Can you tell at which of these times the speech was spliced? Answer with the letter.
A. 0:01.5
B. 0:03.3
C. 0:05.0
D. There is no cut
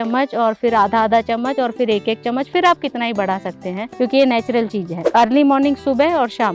C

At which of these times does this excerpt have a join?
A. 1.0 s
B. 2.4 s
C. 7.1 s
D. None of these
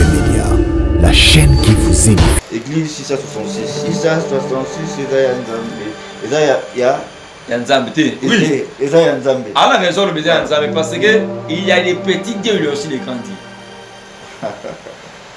B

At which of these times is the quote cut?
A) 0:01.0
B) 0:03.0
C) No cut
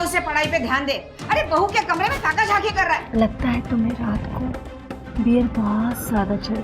B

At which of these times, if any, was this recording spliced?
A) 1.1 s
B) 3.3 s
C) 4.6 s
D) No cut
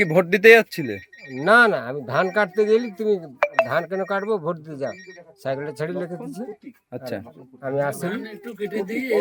D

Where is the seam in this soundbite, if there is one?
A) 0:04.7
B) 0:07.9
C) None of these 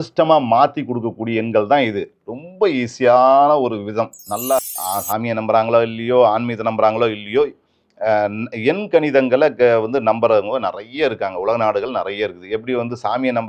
A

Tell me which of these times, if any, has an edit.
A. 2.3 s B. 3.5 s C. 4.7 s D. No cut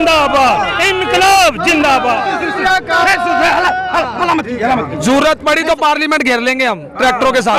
D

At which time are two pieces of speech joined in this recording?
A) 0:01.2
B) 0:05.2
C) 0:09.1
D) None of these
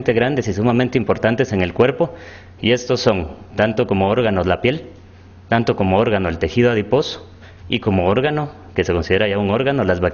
D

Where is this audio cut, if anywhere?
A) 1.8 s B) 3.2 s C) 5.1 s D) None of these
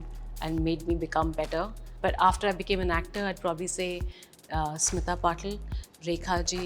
A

